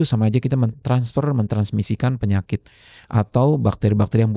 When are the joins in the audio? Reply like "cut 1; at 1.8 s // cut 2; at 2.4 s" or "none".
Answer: none